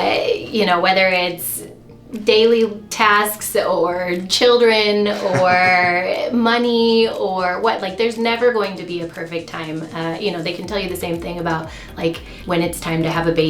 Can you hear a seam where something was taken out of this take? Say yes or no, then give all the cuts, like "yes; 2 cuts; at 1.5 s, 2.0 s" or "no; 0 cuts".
yes; 1 cut; at 12.3 s